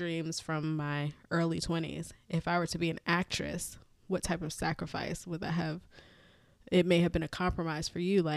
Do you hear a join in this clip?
no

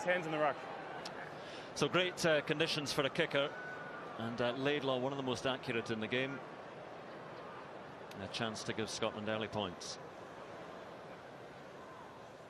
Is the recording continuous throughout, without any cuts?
yes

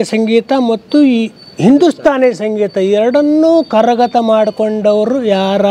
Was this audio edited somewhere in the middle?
no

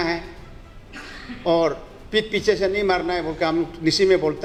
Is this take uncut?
yes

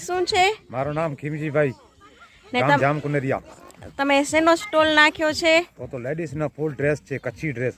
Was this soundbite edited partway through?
no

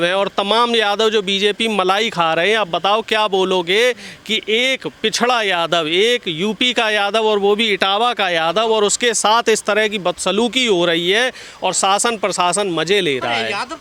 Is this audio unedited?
yes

